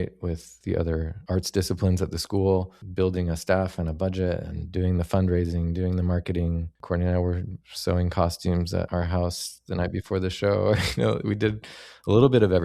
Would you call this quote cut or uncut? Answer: cut